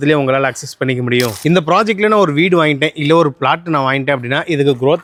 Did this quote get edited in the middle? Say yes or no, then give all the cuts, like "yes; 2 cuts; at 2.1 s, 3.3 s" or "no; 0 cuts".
no; 0 cuts